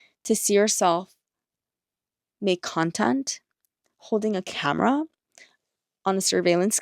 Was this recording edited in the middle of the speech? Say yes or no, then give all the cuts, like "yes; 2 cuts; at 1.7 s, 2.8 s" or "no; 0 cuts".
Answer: no; 0 cuts